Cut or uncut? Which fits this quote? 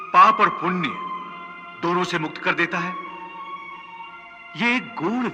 uncut